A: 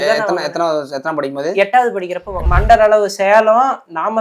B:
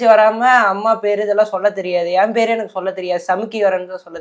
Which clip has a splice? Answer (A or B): A